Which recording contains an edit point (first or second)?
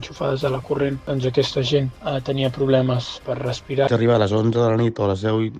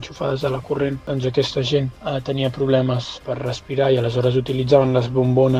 first